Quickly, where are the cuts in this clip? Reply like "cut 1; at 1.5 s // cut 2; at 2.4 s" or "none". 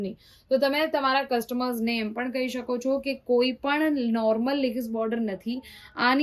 none

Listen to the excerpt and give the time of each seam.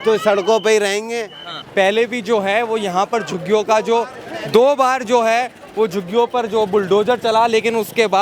cut 1; at 1.6 s

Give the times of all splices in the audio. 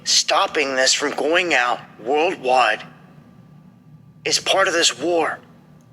cut 1; at 2.5 s

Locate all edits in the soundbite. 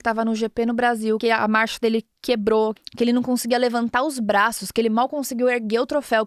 cut 1; at 1.2 s // cut 2; at 2.7 s

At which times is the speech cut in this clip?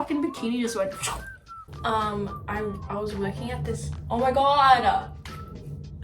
cut 1; at 1.6 s

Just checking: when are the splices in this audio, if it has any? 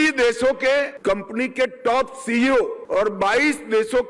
cut 1; at 0.9 s // cut 2; at 2.8 s

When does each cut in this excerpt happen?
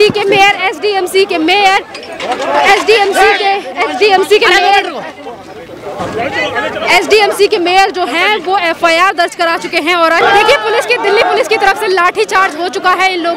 cut 1; at 10.2 s

